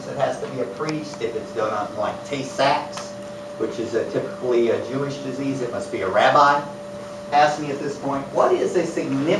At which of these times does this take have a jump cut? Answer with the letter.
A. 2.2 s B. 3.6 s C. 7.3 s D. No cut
D